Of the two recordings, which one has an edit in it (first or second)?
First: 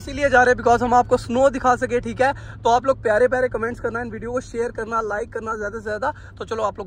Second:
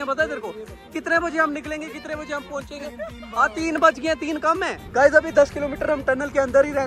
second